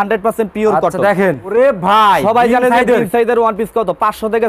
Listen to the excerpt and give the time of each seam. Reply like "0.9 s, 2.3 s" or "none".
1.5 s